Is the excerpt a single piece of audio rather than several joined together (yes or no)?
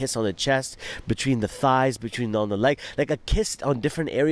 yes